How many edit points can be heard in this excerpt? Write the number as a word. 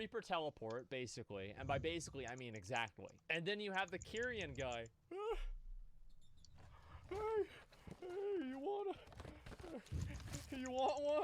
one